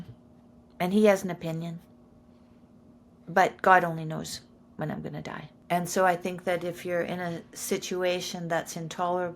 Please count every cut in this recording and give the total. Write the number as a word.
one